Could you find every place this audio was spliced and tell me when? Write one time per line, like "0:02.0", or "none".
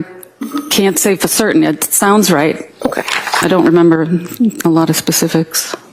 none